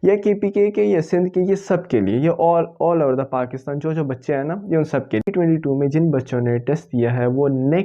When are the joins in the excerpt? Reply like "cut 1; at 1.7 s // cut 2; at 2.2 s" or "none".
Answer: cut 1; at 5.3 s